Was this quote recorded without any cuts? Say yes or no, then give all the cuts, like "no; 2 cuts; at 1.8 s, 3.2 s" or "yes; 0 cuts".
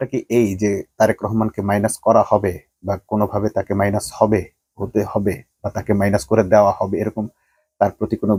yes; 0 cuts